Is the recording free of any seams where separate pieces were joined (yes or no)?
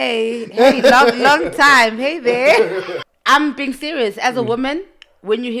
no